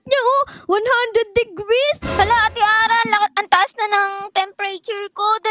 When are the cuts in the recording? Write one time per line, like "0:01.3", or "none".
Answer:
none